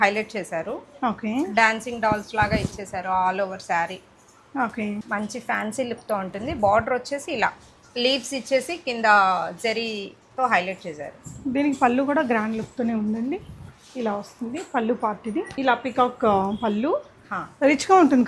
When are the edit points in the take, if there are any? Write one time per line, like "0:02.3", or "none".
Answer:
0:05.0
0:15.5